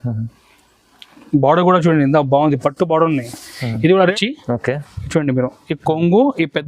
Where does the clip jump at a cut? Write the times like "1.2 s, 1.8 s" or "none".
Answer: 4.1 s